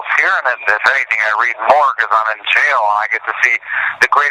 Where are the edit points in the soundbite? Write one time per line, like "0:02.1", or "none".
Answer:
0:02.5